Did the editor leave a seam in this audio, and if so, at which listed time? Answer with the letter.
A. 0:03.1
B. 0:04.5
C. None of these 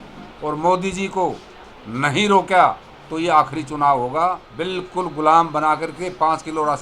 B